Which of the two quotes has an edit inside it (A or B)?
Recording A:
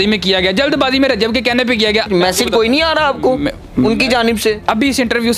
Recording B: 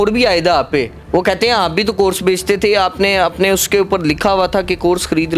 A